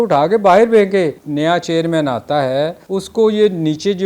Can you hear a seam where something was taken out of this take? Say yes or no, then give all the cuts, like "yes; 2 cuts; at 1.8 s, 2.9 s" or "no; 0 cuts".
yes; 2 cuts; at 1.2 s, 2.8 s